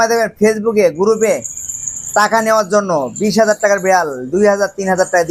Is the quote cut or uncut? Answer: uncut